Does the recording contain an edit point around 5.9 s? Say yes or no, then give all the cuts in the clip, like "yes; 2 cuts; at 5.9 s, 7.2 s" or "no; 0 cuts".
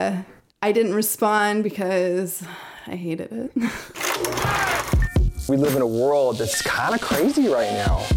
no; 1 cut; at 4.0 s